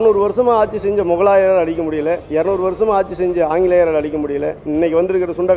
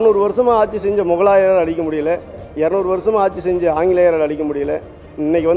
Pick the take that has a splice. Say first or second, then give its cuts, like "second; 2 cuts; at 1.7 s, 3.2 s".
first; 2 cuts; at 2.2 s, 4.6 s